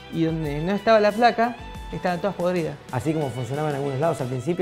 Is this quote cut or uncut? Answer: cut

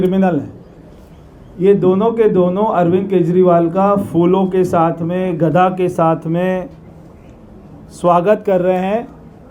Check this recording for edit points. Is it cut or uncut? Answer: uncut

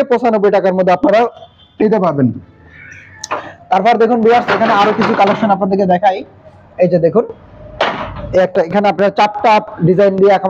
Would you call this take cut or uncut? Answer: uncut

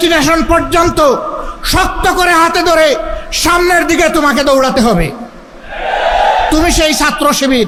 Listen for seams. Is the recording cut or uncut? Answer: uncut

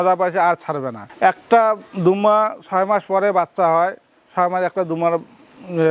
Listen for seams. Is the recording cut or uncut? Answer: uncut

